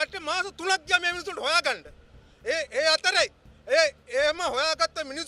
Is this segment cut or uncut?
uncut